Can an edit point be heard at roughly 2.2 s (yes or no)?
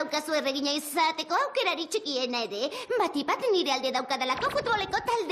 yes